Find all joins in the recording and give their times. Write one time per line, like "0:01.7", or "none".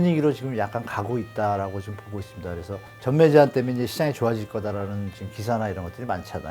0:02.8